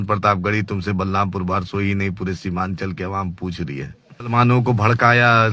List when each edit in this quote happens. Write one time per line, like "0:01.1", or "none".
0:04.3